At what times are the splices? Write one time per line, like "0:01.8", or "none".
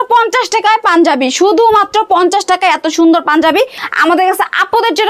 0:03.8